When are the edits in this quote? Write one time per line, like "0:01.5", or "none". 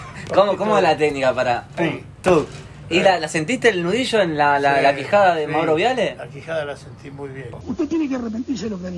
0:07.5